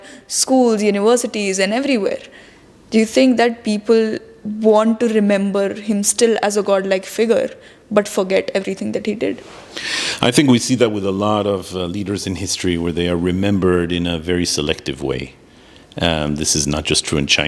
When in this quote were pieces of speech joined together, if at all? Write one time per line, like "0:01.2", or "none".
none